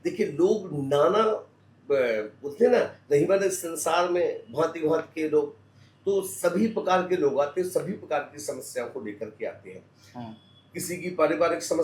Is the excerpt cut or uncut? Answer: uncut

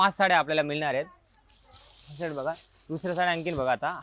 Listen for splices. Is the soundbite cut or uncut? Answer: uncut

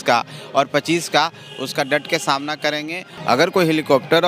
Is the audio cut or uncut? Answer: cut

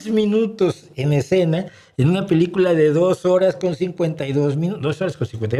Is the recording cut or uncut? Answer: uncut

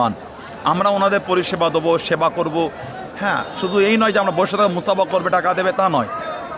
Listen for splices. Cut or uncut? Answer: uncut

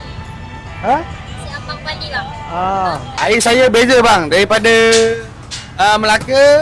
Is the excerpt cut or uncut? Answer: cut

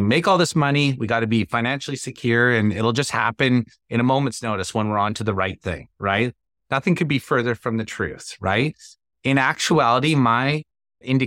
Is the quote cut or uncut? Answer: uncut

